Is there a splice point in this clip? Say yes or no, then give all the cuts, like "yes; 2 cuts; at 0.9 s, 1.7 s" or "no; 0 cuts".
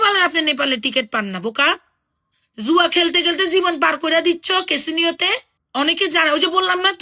yes; 1 cut; at 5.5 s